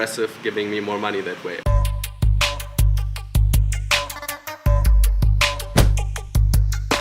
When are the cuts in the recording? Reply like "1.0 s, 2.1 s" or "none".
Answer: 1.6 s